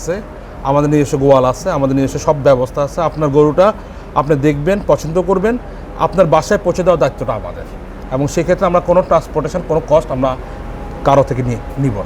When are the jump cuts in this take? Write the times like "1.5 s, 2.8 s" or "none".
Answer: none